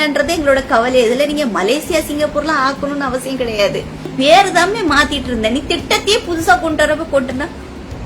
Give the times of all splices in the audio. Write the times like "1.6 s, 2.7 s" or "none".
4.1 s